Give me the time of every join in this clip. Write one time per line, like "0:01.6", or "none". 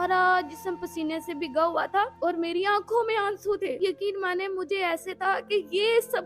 0:02.2
0:03.7